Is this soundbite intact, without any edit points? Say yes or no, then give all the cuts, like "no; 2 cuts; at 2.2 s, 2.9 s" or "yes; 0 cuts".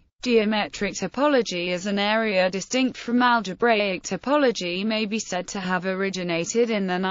no; 1 cut; at 2.8 s